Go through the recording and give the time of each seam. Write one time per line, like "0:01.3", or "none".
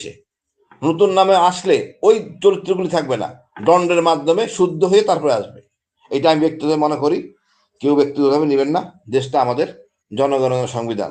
none